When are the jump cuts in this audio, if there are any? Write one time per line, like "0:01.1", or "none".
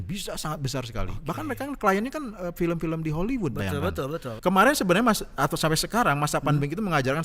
0:04.3